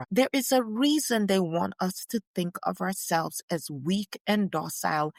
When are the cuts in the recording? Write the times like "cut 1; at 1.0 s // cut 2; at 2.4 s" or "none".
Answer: none